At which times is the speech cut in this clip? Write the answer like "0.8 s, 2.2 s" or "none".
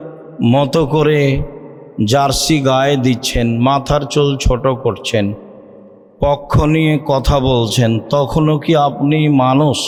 none